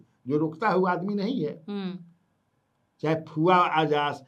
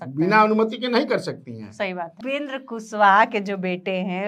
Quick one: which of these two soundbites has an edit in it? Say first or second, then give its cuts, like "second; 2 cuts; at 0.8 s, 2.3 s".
second; 1 cut; at 2.2 s